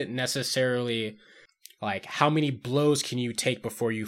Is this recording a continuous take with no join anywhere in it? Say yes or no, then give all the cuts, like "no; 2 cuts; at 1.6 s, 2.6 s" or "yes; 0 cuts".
yes; 0 cuts